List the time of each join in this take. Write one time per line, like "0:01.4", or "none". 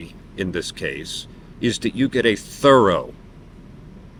none